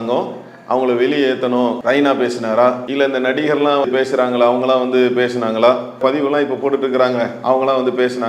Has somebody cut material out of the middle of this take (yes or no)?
yes